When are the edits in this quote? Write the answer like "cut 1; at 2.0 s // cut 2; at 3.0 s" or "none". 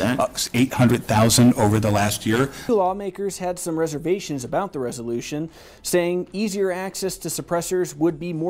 cut 1; at 2.6 s